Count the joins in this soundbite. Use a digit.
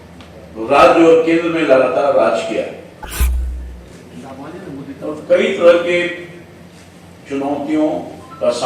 1